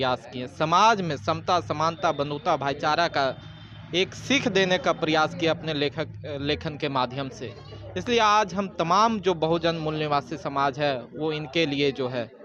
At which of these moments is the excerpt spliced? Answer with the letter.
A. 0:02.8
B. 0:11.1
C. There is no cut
C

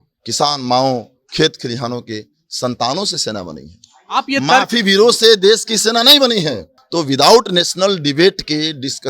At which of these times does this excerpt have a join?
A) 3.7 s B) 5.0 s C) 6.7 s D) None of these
C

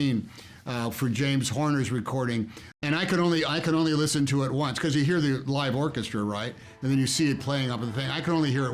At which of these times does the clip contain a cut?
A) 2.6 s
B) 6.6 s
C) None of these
A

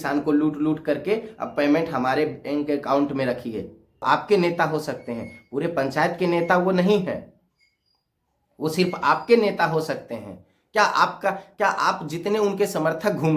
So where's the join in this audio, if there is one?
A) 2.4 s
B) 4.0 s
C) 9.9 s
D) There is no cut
B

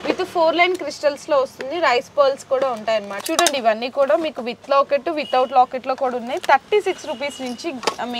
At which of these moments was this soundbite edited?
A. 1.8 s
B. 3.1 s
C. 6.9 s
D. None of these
B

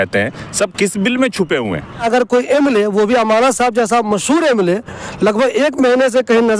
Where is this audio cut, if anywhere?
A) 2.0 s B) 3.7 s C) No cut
A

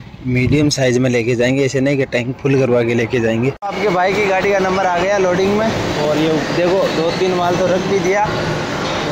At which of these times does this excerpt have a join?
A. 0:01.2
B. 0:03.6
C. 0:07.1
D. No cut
B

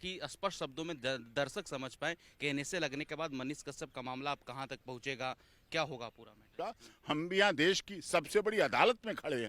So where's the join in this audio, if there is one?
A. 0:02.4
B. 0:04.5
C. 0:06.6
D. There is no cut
C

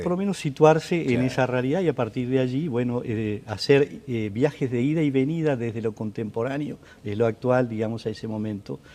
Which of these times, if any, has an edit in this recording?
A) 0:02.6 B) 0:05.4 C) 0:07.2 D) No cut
B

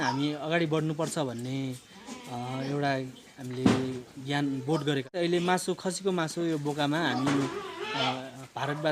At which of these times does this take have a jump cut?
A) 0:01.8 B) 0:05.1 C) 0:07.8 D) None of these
B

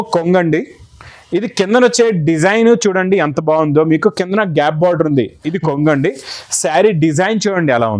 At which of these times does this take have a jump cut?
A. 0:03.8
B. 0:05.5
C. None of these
B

